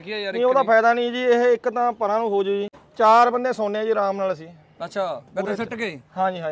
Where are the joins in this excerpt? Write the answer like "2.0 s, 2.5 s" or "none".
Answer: 2.8 s

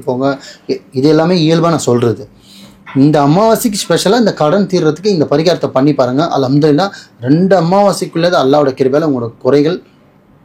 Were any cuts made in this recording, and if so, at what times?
none

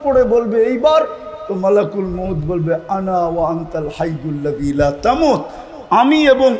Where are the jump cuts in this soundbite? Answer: none

